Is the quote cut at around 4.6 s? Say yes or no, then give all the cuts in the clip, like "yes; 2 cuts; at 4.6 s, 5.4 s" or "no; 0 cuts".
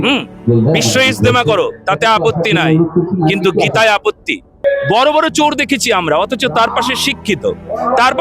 yes; 1 cut; at 4.6 s